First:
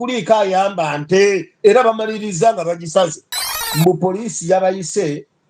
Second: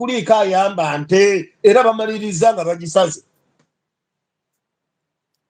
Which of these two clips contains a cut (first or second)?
first